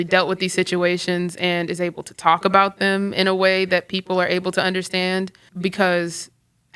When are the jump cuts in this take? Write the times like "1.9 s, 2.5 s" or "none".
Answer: 5.4 s